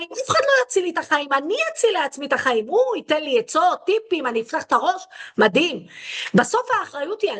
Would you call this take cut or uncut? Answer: uncut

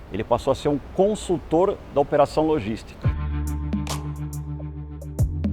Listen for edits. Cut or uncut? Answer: cut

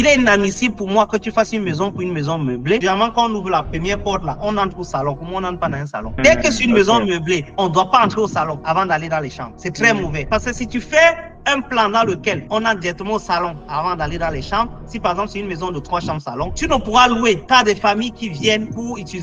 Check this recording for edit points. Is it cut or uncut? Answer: uncut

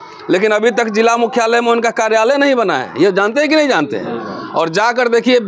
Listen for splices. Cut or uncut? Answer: uncut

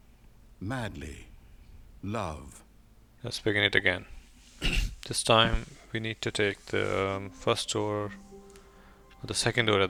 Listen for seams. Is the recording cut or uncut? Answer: uncut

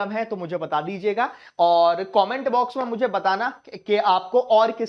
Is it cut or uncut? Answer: uncut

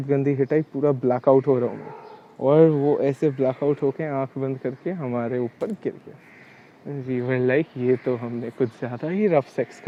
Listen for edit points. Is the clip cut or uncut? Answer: uncut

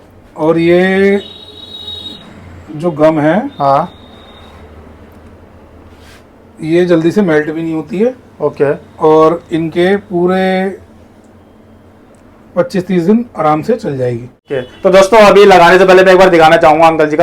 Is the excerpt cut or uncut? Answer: cut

